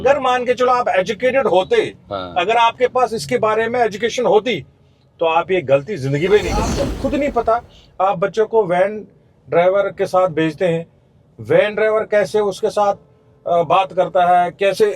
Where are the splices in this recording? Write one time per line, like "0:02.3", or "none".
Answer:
0:06.8